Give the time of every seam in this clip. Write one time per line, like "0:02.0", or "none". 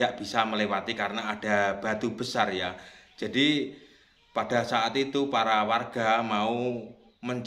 none